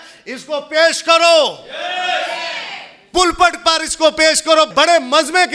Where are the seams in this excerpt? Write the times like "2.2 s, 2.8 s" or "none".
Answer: none